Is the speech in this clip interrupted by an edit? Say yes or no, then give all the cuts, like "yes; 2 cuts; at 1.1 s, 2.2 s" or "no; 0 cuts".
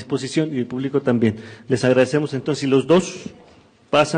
no; 0 cuts